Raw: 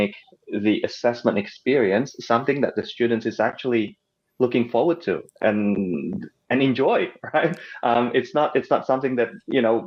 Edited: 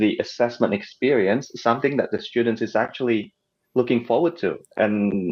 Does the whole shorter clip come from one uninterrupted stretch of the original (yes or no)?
yes